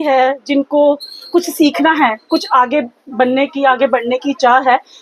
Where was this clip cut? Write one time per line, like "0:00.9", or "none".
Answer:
none